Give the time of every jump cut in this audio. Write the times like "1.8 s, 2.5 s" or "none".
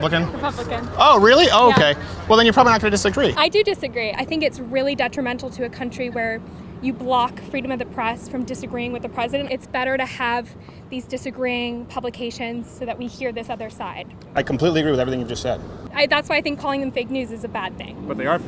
4.1 s, 9.5 s, 15.8 s